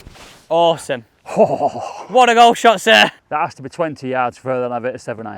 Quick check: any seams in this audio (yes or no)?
yes